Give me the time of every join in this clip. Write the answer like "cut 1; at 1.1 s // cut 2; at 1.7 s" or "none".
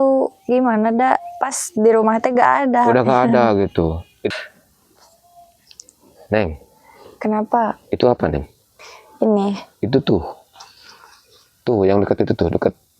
cut 1; at 4.3 s